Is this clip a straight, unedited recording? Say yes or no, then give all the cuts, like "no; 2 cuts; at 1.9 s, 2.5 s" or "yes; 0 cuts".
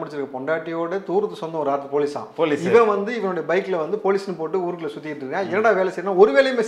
yes; 0 cuts